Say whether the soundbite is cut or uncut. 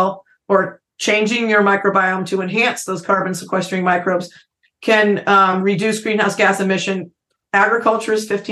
uncut